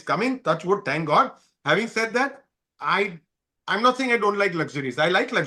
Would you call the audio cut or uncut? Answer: uncut